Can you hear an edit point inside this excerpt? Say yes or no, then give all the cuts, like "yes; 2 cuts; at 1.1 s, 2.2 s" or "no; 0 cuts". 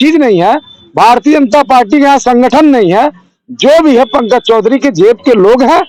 no; 0 cuts